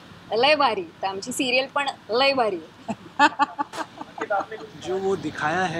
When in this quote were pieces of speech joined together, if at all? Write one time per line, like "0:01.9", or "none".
0:04.7